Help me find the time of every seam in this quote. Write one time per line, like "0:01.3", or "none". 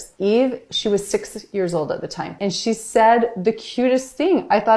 0:02.3

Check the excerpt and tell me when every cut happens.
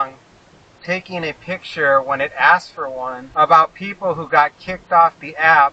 0:03.2

